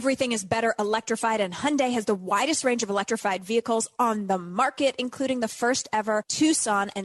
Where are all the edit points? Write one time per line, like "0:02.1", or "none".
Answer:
none